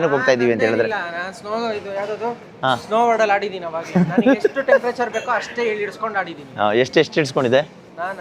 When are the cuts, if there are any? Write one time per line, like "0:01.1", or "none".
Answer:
none